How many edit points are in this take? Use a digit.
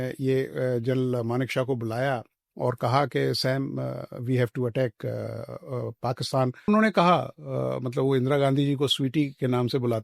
1